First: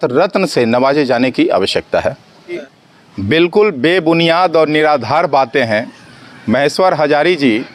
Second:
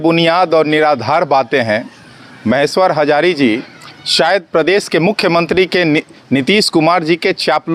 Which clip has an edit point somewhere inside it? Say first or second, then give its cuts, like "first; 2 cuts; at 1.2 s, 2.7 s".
first; 1 cut; at 2.8 s